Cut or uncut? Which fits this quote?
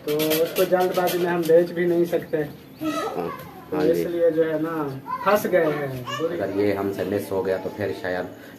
cut